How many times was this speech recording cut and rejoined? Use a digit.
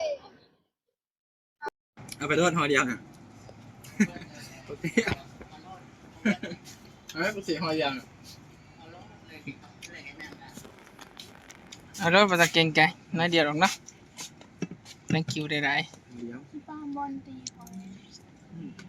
1